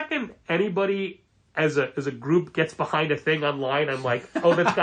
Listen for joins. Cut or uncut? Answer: uncut